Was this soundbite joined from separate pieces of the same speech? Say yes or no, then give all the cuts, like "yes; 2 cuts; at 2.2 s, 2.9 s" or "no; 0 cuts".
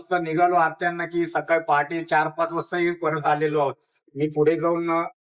yes; 1 cut; at 4.0 s